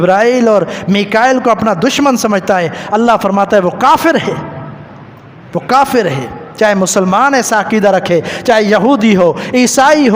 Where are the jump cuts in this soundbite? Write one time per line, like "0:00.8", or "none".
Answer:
none